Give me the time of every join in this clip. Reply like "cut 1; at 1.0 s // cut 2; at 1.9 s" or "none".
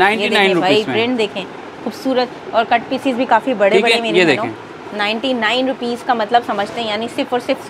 none